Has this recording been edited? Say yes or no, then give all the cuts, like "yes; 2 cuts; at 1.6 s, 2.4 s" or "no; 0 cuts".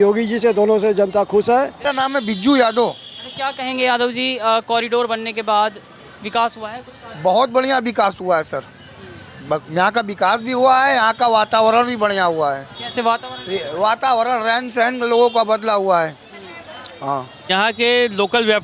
yes; 2 cuts; at 1.8 s, 17.5 s